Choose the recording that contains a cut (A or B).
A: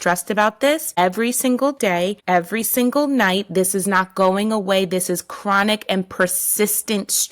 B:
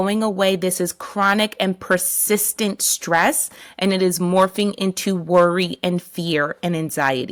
A